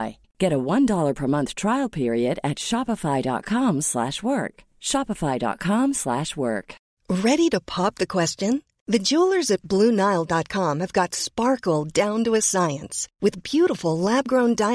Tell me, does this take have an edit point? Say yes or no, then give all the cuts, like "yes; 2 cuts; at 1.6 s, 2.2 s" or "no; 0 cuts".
yes; 1 cut; at 6.8 s